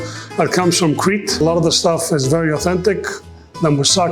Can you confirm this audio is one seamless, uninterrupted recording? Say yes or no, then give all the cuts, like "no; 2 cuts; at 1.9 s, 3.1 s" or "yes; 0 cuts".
no; 1 cut; at 1.4 s